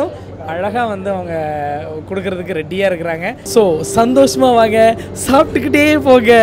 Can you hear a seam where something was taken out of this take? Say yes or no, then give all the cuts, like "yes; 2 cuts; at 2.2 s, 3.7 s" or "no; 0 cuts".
yes; 1 cut; at 3.4 s